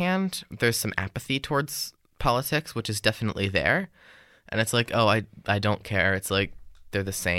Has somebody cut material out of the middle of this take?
no; 0 cuts

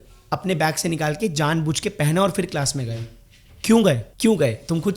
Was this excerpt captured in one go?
no; 1 cut; at 4.1 s

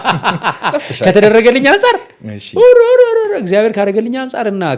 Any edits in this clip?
no; 0 cuts

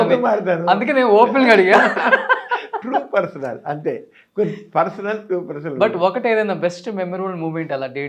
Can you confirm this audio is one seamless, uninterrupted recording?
yes; 0 cuts

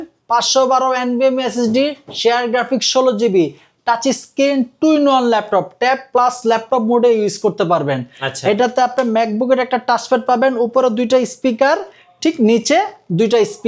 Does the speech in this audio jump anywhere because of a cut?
no; 0 cuts

